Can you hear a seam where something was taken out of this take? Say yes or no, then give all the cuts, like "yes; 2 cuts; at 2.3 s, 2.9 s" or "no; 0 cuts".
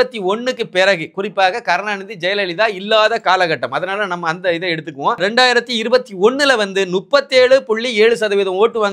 yes; 1 cut; at 5.2 s